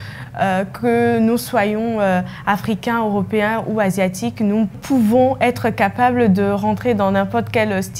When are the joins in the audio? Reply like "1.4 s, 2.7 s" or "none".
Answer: none